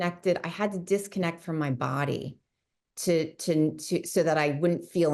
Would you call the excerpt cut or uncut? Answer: uncut